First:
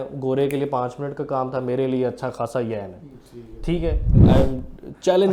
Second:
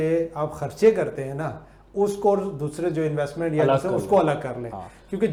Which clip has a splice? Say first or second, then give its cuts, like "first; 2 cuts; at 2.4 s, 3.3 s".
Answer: first; 1 cut; at 4.2 s